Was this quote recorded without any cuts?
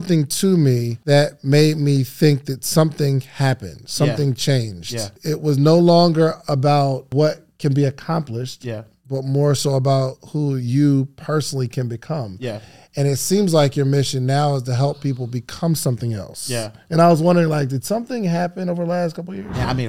no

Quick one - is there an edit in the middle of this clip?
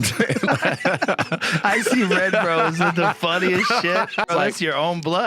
yes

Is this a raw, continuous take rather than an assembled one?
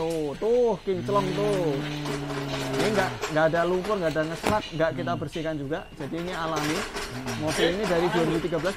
yes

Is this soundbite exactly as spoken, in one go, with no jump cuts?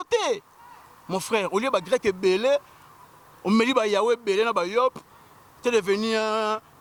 yes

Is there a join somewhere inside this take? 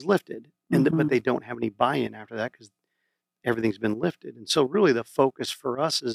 no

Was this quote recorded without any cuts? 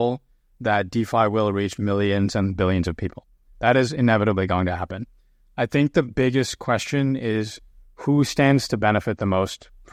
yes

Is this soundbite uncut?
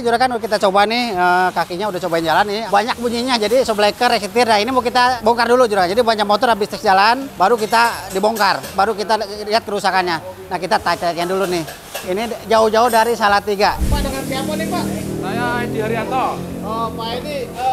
yes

